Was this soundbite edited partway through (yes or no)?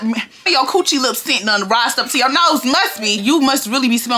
yes